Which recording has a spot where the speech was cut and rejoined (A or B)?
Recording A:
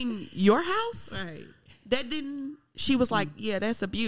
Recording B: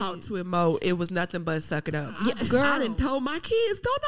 B